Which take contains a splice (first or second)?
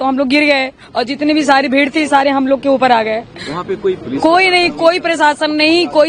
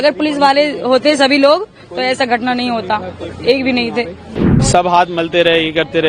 second